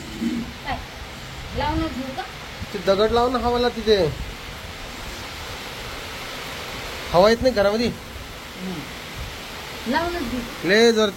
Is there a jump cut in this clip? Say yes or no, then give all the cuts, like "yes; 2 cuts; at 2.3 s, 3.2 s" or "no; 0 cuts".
no; 0 cuts